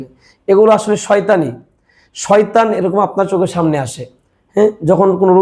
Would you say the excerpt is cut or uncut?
uncut